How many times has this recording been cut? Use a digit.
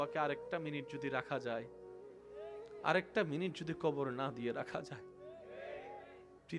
0